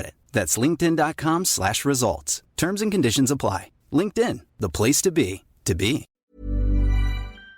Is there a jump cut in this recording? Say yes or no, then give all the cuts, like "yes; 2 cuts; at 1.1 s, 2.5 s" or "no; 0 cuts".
yes; 1 cut; at 6.2 s